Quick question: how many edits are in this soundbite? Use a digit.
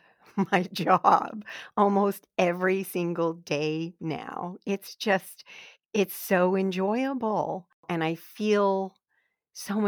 1